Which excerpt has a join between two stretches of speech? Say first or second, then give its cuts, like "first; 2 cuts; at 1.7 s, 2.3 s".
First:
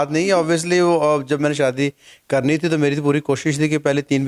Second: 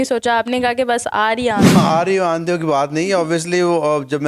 second; 1 cut; at 1.7 s